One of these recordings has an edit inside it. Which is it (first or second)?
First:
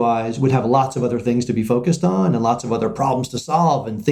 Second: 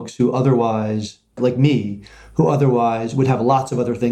second